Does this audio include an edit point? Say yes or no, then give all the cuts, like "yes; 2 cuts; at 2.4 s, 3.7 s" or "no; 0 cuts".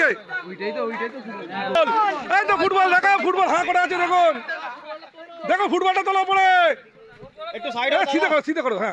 yes; 1 cut; at 1.8 s